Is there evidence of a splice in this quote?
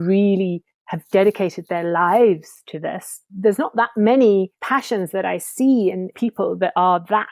yes; 2 cuts; at 3.3 s, 4.6 s

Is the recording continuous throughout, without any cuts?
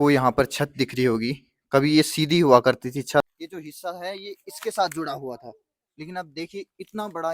no; 1 cut; at 3.2 s

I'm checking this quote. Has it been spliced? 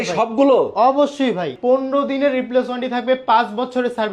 yes; 1 cut; at 1.5 s

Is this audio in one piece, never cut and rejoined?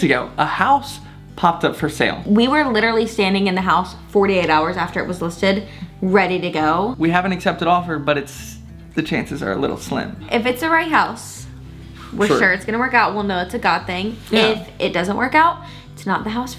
no; 3 cuts; at 2.2 s, 6.9 s, 10.2 s

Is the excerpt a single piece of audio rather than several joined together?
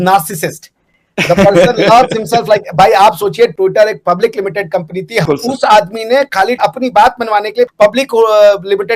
no; 2 cuts; at 5.2 s, 7.7 s

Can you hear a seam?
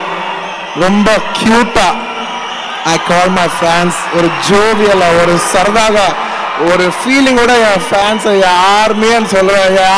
no; 0 cuts

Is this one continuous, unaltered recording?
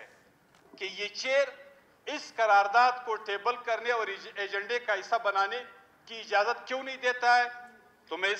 yes; 0 cuts

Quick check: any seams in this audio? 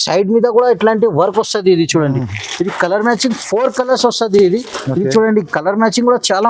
no; 0 cuts

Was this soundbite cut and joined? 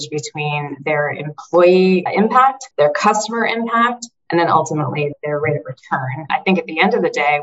yes; 2 cuts; at 2.6 s, 6.2 s

